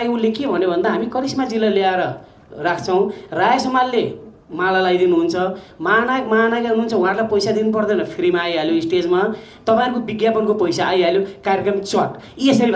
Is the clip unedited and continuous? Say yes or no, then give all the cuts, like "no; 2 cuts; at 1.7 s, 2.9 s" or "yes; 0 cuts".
yes; 0 cuts